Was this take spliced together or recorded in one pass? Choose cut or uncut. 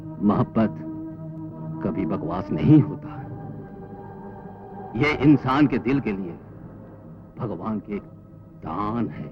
uncut